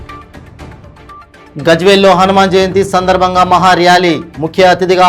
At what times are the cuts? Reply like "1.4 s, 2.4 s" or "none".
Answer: none